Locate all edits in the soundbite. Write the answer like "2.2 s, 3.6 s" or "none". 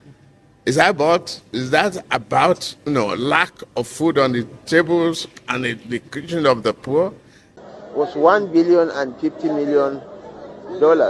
7.5 s